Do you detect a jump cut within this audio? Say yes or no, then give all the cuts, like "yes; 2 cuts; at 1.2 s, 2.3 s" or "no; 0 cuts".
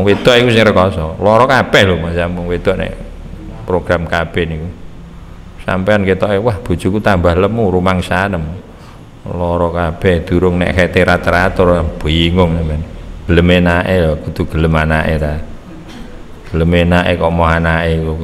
yes; 1 cut; at 13.2 s